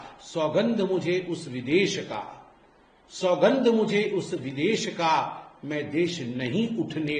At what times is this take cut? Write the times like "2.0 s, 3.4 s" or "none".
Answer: none